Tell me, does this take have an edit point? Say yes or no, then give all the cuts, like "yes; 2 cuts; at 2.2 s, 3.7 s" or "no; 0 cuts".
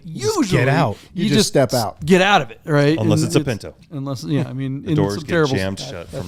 no; 0 cuts